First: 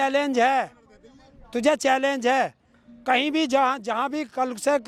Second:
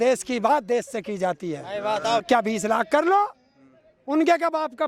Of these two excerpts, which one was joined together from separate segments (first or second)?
second